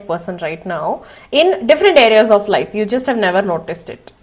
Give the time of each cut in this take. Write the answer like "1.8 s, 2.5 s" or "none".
none